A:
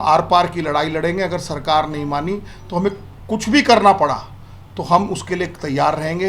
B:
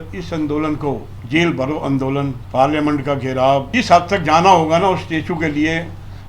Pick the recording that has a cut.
B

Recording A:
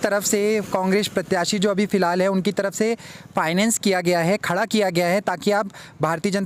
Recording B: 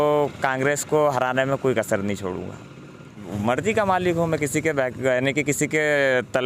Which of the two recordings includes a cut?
B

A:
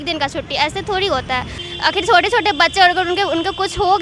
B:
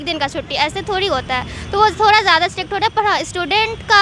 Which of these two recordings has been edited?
A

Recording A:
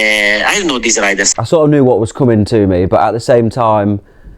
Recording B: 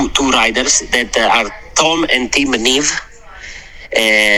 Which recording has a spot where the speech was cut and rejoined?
A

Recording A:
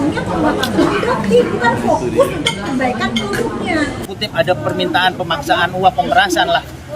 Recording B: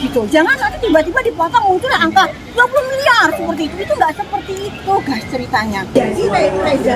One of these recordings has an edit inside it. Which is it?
A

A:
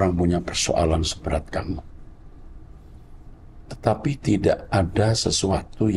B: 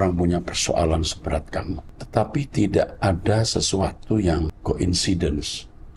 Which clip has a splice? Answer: B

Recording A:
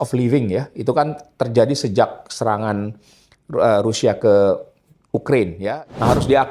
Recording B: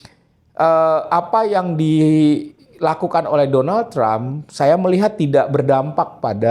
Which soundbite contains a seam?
A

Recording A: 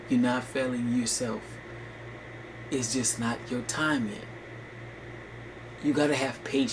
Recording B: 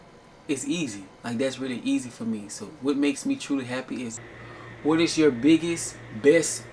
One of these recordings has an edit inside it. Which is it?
B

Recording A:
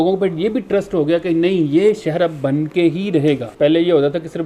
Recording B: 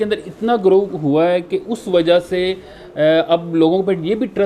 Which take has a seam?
A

